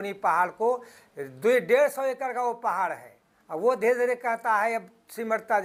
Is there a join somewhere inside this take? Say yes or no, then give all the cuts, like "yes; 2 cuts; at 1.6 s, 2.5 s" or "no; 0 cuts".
no; 0 cuts